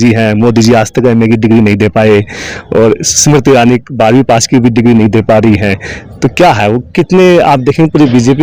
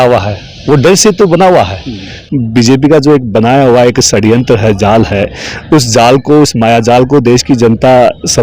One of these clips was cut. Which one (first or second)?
second